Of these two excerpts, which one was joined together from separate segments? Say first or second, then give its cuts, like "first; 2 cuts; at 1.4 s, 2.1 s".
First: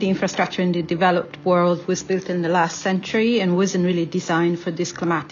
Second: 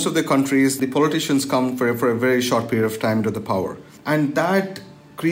second; 1 cut; at 3.9 s